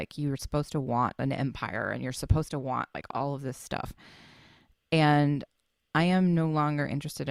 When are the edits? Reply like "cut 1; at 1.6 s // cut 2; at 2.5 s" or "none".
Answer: cut 1; at 3.0 s